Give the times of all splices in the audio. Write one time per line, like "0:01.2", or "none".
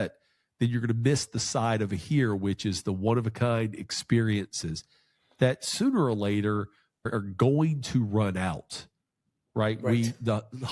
0:07.1